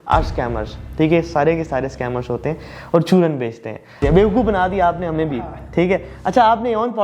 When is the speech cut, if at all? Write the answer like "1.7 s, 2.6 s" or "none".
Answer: 4.0 s